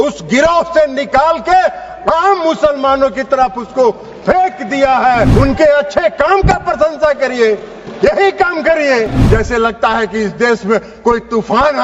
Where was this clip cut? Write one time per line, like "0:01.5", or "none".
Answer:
0:05.3
0:09.2